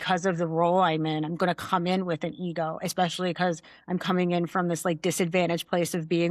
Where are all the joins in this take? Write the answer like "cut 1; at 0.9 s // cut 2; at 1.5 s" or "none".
none